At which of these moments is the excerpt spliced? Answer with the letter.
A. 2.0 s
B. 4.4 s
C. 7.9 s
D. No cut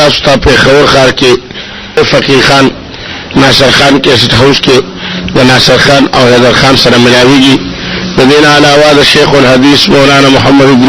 A